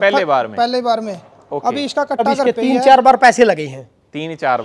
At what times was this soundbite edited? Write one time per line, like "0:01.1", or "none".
0:02.4